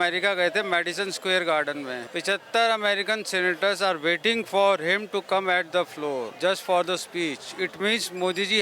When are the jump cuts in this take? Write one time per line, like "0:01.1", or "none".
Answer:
0:02.0
0:06.3